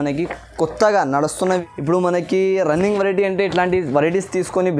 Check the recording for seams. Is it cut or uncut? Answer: cut